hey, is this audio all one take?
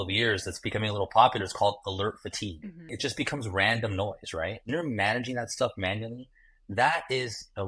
no; 1 cut; at 4.6 s

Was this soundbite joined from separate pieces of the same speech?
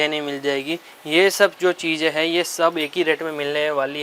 no; 0 cuts

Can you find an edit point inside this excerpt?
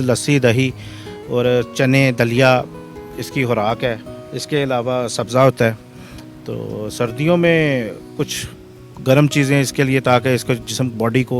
no; 0 cuts

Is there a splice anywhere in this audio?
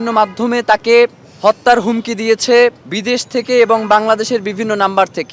yes; 2 cuts; at 1.2 s, 2.9 s

